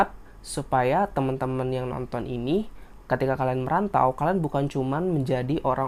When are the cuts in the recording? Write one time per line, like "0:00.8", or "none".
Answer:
none